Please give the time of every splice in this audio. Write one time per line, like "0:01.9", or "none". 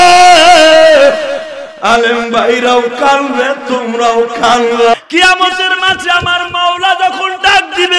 0:04.9